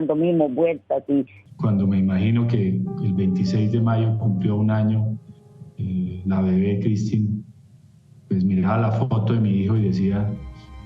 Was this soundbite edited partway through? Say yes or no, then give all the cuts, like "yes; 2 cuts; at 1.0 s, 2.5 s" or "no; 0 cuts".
yes; 1 cut; at 1.4 s